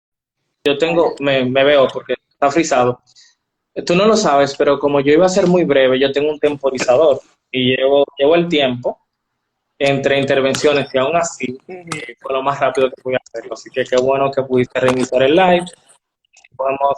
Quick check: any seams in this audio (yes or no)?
yes